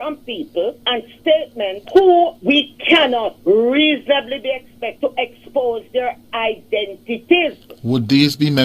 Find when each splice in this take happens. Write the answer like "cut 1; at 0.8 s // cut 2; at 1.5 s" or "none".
none